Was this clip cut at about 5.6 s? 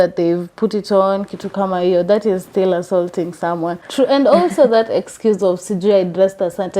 no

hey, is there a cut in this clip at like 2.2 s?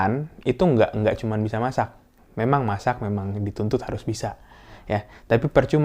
yes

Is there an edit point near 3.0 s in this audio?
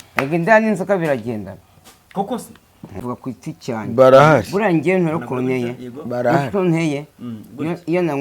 yes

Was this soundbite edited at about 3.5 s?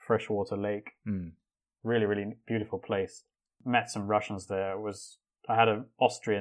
yes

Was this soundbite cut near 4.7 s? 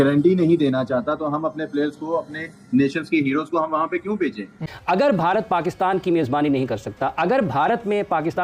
yes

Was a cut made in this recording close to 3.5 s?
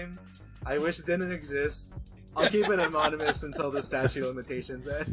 no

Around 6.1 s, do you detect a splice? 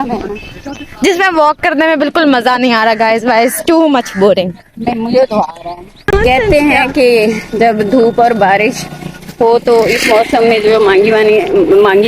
yes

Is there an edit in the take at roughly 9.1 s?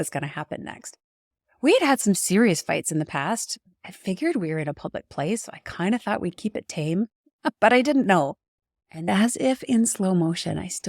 yes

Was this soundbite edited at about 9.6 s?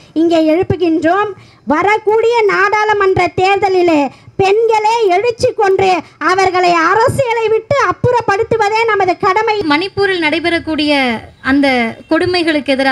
yes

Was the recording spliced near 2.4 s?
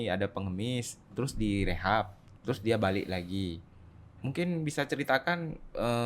no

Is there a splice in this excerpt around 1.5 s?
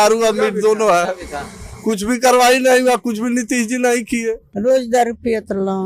no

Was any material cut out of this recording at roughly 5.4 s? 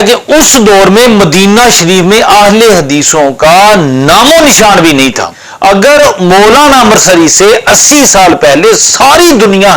yes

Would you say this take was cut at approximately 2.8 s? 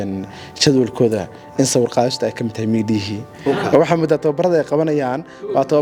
no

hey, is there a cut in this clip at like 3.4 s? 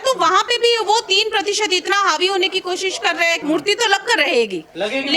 yes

